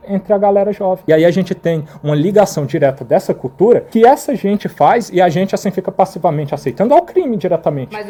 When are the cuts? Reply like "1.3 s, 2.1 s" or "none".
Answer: none